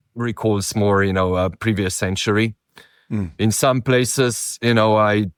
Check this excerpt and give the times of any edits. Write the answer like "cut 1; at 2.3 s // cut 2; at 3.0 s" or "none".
none